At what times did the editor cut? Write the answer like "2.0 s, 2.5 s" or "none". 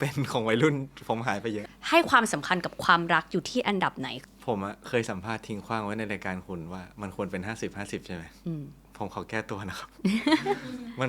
1.7 s, 4.1 s